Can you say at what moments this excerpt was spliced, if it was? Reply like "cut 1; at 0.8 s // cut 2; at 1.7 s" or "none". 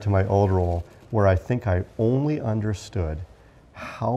none

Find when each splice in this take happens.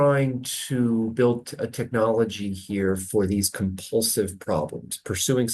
none

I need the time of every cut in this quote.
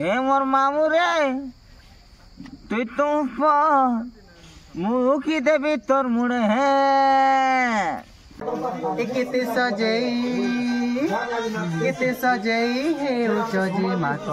cut 1; at 8.4 s

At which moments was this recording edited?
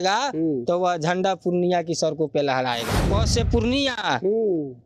cut 1; at 2.9 s

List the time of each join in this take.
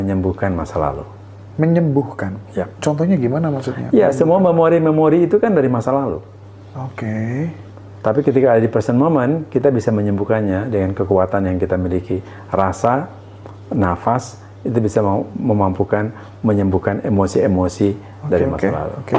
none

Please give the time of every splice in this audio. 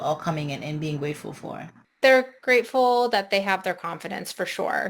cut 1; at 1.8 s

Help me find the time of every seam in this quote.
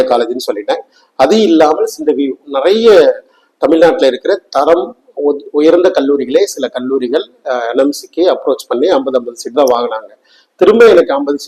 none

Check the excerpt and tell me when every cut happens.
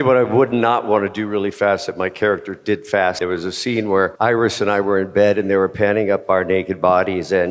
cut 1; at 3.2 s // cut 2; at 4.1 s

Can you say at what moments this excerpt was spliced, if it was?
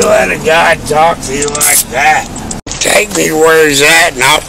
cut 1; at 2.6 s

